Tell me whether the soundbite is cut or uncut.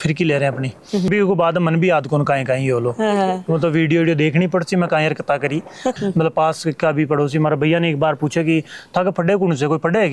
cut